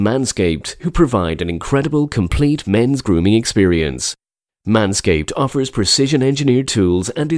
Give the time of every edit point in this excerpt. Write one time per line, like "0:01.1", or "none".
none